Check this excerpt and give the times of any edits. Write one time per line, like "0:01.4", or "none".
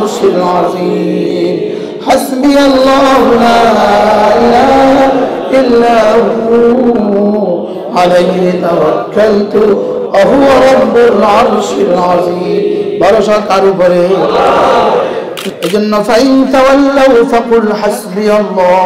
0:15.5